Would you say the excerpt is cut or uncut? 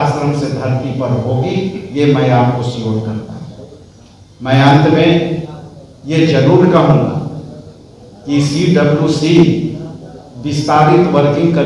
uncut